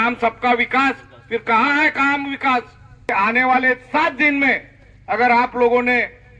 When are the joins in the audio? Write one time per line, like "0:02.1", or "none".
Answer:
0:03.1

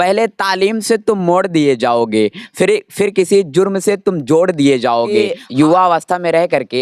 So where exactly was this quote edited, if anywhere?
0:05.3

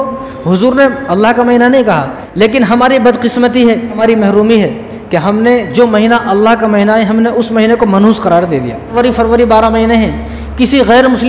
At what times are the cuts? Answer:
0:02.2
0:04.0
0:08.9

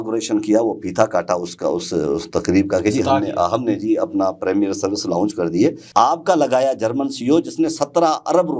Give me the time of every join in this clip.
0:05.8

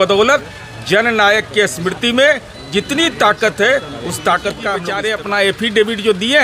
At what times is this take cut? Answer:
0:04.8

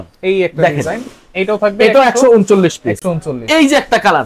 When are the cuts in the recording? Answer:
none

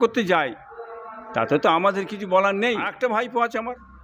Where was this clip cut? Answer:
0:02.9

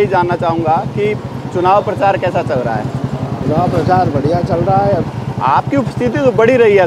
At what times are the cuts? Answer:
0:03.4
0:05.0

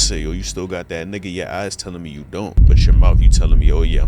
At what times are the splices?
0:02.6

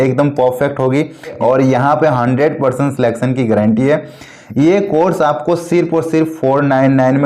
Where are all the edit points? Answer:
0:01.4

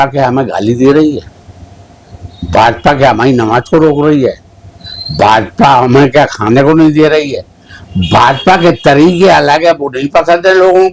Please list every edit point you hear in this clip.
none

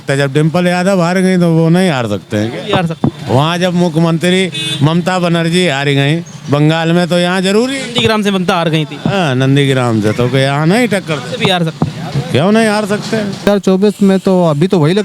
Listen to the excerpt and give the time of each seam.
0:13.5

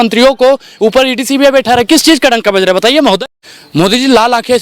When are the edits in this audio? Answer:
0:03.2

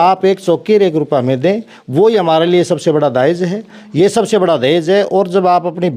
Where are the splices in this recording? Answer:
none

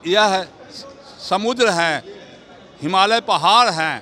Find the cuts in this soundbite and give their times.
none

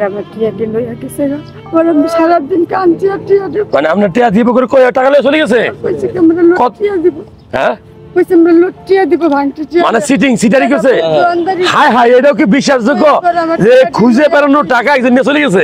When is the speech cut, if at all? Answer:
none

